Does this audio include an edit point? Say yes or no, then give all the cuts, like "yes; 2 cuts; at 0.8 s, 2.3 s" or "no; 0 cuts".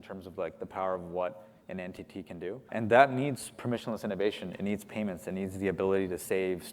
yes; 1 cut; at 2.7 s